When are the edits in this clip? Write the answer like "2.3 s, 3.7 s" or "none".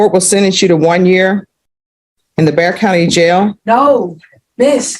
3.3 s